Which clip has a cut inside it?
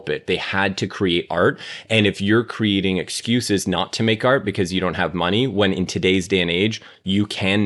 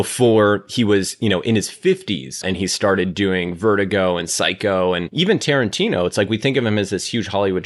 second; 2 cuts; at 2.4 s, 5.1 s

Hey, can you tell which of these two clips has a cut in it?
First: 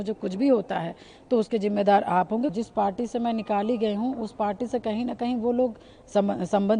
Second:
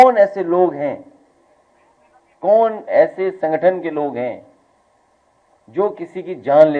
first; 1 cut; at 2.5 s

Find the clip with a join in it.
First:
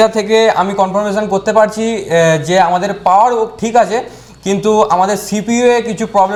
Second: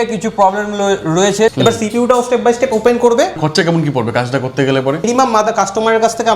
second; 3 cuts; at 1.5 s, 3.4 s, 5.1 s

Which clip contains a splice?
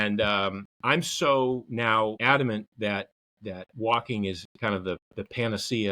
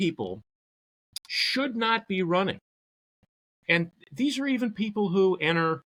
first; 1 cut; at 2.2 s

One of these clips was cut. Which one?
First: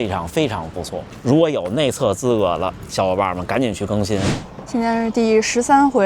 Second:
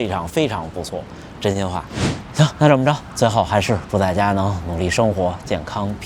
first; 2 cuts; at 1.1 s, 4.4 s

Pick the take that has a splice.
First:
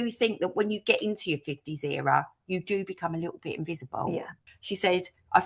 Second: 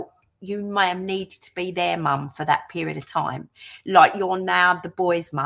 first; 1 cut; at 4.4 s

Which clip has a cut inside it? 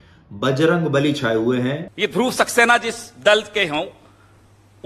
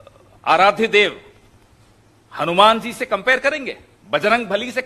first; 1 cut; at 1.9 s

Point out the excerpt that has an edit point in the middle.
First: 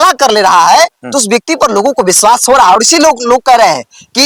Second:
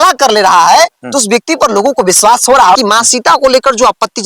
second; 1 cut; at 2.8 s

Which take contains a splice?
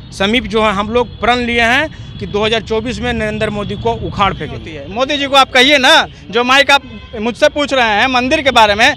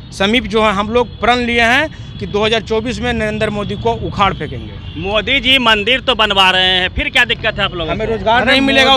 first; 1 cut; at 4.8 s

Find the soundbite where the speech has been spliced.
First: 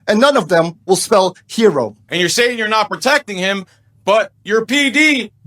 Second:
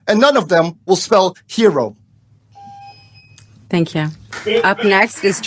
first; 1 cut; at 2.0 s

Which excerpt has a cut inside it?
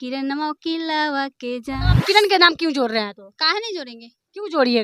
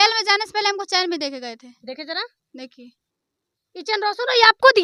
first; 1 cut; at 1.9 s

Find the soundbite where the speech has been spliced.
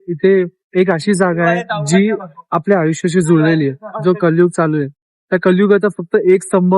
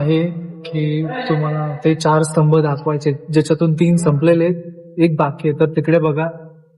first; 1 cut; at 3.9 s

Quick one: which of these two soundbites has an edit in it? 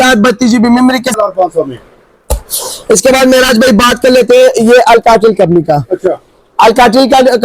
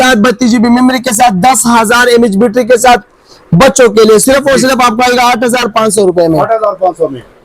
first; 1 cut; at 1.1 s

